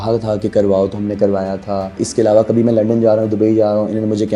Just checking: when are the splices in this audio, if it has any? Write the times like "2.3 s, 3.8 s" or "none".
none